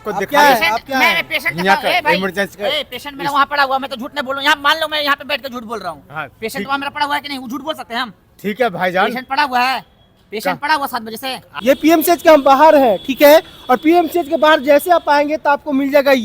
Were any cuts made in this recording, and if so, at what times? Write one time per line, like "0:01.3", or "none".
0:11.5